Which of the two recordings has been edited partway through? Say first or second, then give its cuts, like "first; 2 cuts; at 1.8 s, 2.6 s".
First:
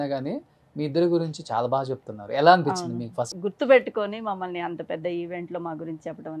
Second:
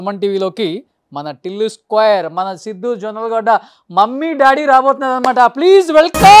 first; 1 cut; at 3.3 s